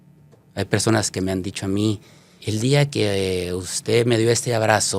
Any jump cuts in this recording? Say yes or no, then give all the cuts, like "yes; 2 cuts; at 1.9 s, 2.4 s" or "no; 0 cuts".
yes; 1 cut; at 2.3 s